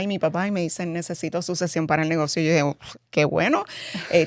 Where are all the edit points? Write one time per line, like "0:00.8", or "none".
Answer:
none